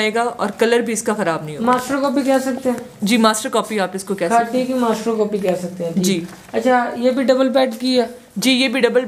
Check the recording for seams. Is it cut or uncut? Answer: uncut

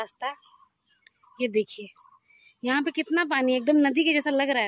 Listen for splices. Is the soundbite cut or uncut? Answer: uncut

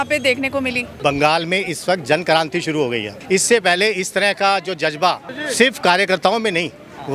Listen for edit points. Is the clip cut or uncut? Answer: cut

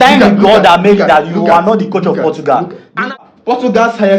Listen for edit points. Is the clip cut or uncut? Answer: cut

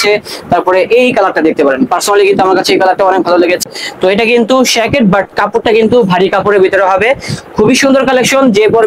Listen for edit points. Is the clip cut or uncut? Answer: cut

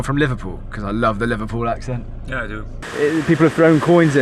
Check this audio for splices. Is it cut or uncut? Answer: cut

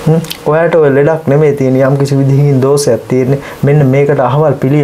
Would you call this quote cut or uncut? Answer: uncut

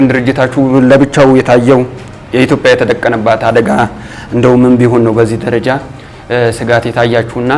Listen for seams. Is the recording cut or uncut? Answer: uncut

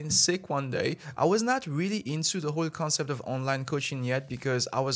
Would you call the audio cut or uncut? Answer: cut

